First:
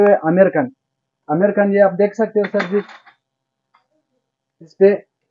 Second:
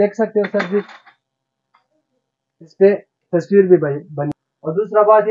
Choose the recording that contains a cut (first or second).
second